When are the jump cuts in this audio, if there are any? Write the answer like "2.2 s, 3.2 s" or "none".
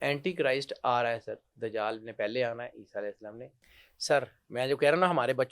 3.6 s

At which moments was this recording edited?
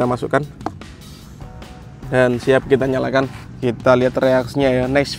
3.4 s

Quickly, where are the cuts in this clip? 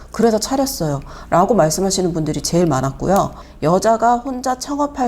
3.5 s

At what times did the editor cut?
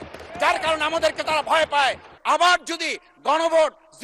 2.1 s

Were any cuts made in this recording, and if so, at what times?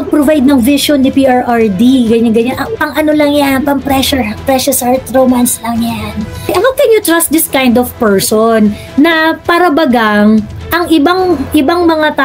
6.4 s

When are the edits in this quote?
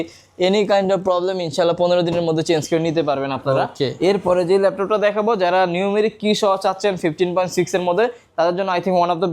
none

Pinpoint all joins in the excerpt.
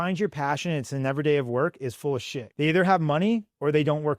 2.4 s

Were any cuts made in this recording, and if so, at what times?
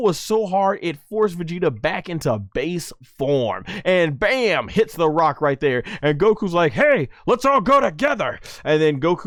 none

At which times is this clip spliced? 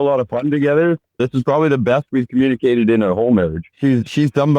1.2 s, 3.7 s

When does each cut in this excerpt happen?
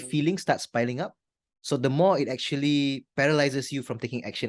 none

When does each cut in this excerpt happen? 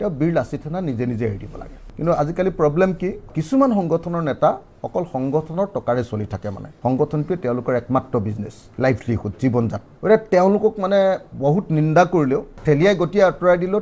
1.8 s, 3.3 s, 12.6 s

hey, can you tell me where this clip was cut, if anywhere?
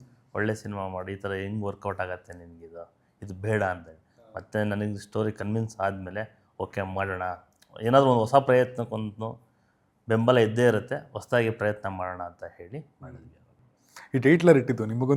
none

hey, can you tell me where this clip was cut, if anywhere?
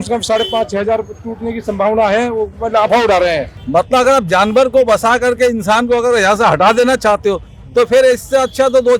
3.5 s

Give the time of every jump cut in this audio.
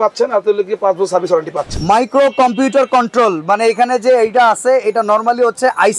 1.8 s

